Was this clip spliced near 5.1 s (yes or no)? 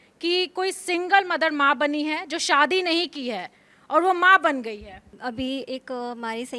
yes